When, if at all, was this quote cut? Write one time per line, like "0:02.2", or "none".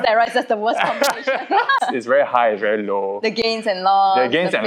0:01.8